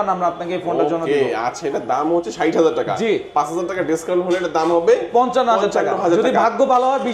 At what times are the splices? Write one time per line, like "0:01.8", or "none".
none

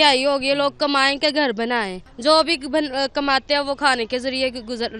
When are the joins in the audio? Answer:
0:02.0

